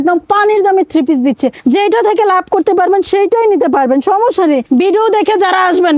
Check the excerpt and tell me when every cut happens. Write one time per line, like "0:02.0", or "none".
0:01.6
0:04.6